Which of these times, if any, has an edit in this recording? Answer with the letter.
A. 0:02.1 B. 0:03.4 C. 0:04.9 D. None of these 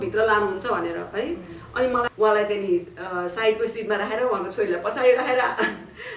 A